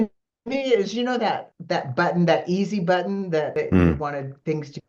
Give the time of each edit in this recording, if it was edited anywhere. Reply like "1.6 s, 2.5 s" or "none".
1.5 s, 3.5 s